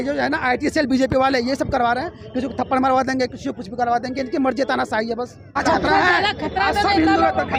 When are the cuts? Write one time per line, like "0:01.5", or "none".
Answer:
none